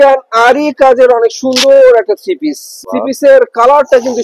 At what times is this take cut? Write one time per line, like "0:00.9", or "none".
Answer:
0:02.8